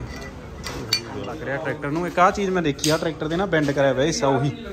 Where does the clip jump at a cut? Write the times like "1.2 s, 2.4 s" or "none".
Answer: 1.3 s